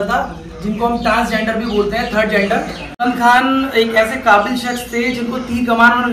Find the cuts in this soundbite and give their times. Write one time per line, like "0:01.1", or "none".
none

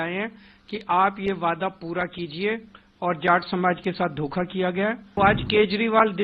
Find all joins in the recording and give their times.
0:05.0

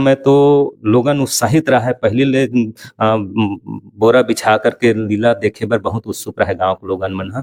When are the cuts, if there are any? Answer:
none

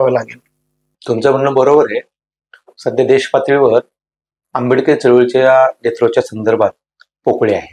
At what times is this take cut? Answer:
none

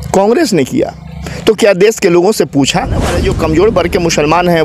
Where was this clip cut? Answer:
0:03.2

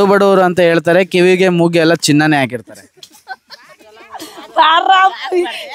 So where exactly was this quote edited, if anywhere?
none

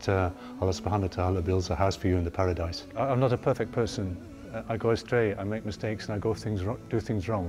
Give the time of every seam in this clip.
0:02.8

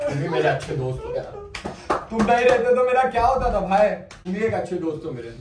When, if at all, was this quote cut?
0:04.1

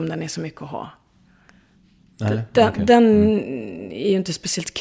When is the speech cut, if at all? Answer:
none

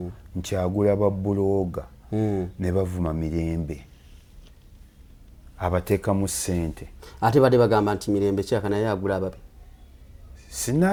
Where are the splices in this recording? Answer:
none

